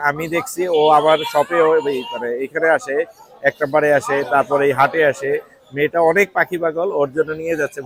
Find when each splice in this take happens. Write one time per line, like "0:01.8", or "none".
none